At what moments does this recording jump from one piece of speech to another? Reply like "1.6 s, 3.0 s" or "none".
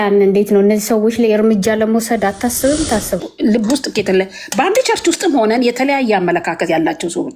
3.2 s